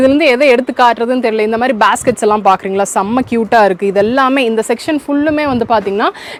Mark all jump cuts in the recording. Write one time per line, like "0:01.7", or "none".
none